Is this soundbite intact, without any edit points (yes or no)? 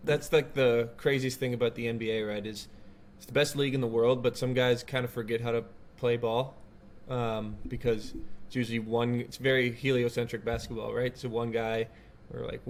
yes